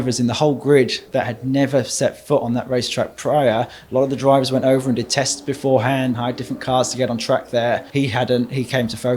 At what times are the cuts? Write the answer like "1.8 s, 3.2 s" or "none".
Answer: 6.1 s, 7.9 s